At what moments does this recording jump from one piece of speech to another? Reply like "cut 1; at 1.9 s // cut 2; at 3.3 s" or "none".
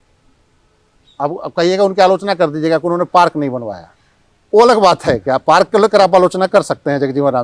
none